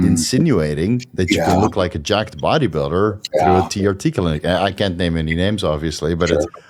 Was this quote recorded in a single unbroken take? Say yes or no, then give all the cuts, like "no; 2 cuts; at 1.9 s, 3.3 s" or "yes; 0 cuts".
yes; 0 cuts